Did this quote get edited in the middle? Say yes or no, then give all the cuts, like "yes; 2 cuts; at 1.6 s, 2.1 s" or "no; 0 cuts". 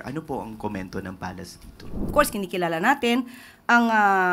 yes; 1 cut; at 2.1 s